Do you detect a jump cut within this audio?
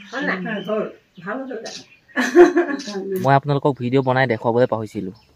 yes; 1 cut; at 3.2 s

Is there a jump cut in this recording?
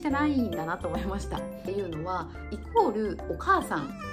yes; 1 cut; at 1.7 s

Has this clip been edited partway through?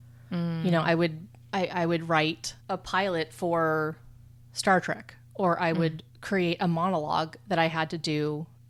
no; 0 cuts

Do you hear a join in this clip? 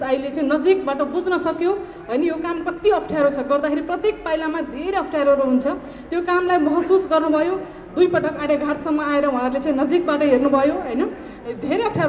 no; 0 cuts

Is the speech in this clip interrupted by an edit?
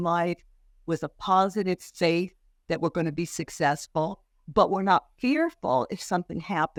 no; 0 cuts

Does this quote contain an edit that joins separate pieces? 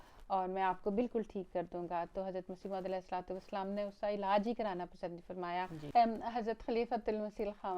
yes; 1 cut; at 5.8 s

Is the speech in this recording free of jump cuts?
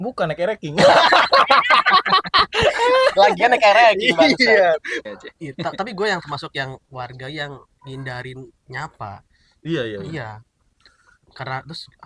no; 1 cut; at 4.9 s

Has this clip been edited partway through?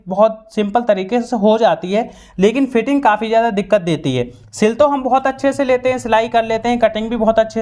no; 0 cuts

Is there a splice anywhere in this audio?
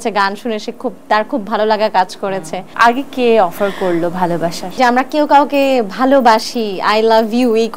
yes; 2 cuts; at 2.7 s, 4.8 s

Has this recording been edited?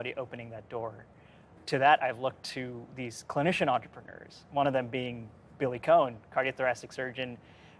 yes; 1 cut; at 1.6 s

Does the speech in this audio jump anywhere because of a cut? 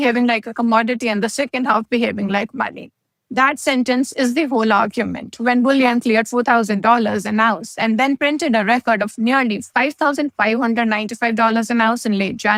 no; 0 cuts

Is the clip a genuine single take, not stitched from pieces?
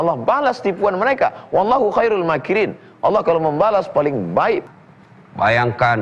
no; 1 cut; at 4.6 s

